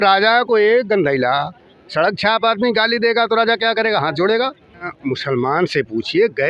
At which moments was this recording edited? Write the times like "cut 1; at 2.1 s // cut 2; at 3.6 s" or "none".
cut 1; at 4.9 s